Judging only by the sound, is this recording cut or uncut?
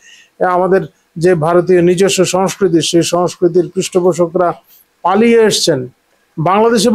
uncut